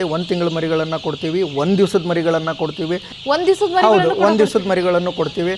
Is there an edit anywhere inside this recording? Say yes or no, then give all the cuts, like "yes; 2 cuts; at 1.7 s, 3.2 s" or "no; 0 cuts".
no; 0 cuts